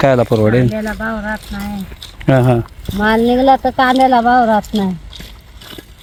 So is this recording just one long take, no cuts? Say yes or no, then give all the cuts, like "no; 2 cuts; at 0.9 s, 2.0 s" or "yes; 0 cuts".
yes; 0 cuts